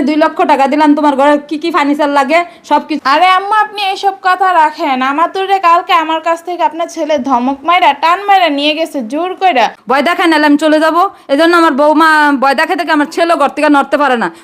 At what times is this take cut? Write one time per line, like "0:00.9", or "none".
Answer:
0:03.0
0:09.8

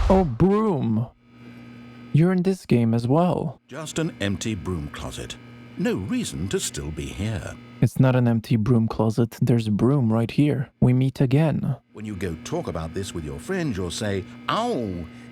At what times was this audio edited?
0:03.9
0:11.8

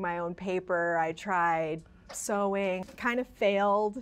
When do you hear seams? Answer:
0:02.8

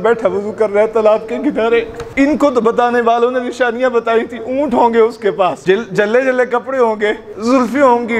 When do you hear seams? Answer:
0:02.1
0:05.6
0:07.3

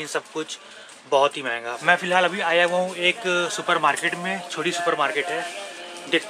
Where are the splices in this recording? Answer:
0:01.7

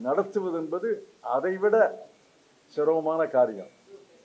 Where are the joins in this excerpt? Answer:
none

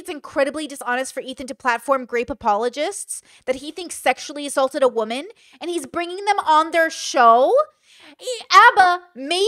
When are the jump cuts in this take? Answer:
none

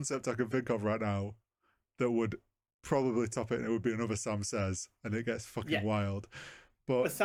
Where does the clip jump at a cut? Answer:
none

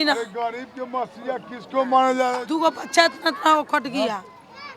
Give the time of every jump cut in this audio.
0:02.3

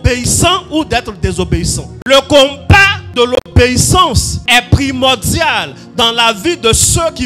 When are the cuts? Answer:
0:01.9
0:03.0
0:04.3

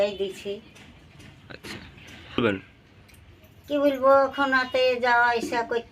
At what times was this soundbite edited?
0:02.3

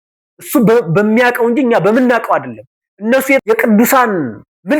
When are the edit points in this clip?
0:03.4

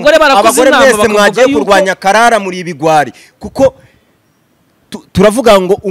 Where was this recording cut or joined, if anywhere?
none

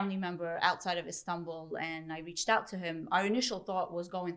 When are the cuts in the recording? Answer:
none

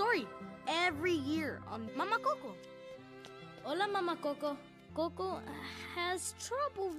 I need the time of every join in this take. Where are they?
0:04.8

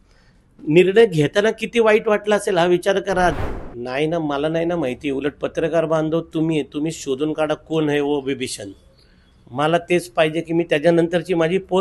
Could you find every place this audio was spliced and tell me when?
0:03.4

